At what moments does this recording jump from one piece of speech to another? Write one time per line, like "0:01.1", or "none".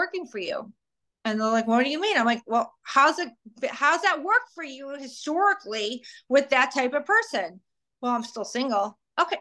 none